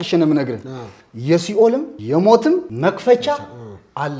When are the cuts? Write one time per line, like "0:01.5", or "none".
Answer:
0:01.9
0:02.7